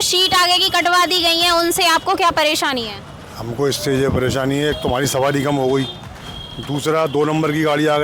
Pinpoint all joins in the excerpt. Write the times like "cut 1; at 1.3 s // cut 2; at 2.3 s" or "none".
none